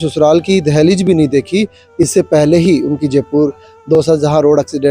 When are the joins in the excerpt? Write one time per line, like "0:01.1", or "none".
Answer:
none